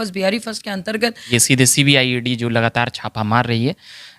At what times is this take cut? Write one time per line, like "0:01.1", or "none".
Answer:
0:01.3